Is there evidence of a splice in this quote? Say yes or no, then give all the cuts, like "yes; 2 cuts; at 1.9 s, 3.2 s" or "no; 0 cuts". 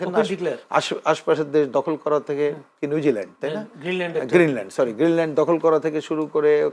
no; 0 cuts